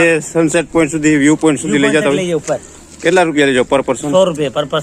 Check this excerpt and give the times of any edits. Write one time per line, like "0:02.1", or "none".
none